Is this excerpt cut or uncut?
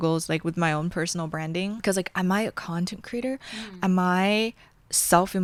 uncut